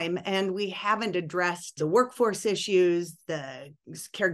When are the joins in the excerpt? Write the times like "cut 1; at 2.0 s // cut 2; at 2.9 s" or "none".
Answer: cut 1; at 1.7 s